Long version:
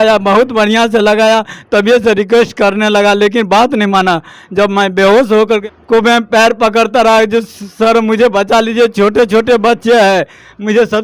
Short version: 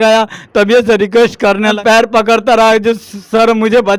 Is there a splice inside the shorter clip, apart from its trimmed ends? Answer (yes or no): yes